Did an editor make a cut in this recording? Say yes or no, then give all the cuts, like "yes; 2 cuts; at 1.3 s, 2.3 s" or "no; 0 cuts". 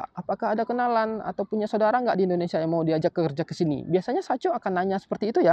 no; 0 cuts